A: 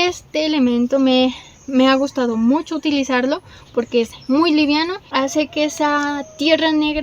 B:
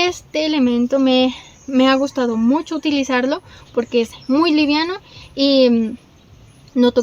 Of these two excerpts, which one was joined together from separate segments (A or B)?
A